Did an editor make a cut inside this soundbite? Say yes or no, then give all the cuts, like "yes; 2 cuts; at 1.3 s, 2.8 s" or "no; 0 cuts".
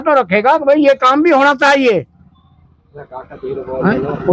no; 0 cuts